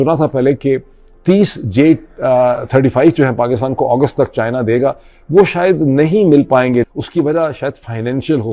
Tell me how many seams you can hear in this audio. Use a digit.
1